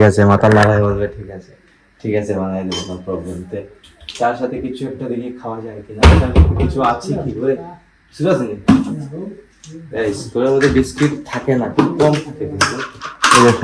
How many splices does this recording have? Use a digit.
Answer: 0